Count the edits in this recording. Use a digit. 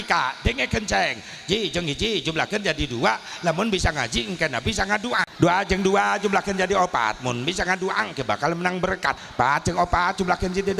2